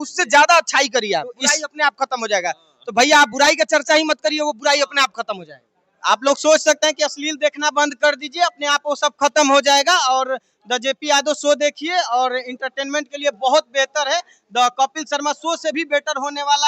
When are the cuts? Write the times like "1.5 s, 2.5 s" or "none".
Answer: none